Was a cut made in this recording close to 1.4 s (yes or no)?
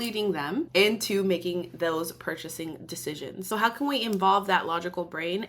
no